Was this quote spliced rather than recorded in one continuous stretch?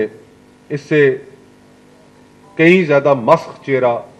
no; 0 cuts

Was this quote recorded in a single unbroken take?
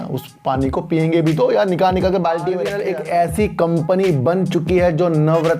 no; 1 cut; at 2.7 s

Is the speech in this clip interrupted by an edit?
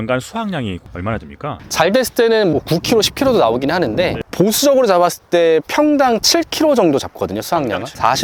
no; 0 cuts

